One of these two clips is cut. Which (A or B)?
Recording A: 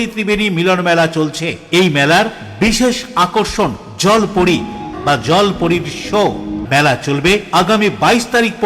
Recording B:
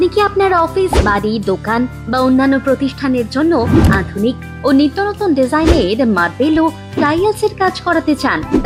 A